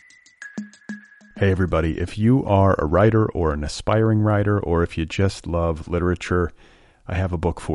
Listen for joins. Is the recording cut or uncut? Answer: cut